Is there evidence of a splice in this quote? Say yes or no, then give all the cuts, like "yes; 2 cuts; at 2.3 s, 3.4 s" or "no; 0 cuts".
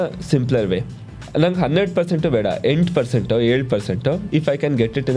yes; 2 cuts; at 1.1 s, 4.2 s